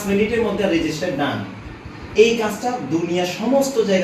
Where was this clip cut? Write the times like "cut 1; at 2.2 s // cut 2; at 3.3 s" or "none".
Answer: none